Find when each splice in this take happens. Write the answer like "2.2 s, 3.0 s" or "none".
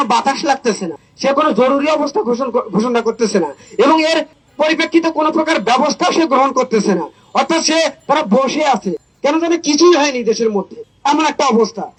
none